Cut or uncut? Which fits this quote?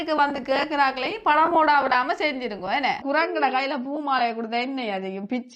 cut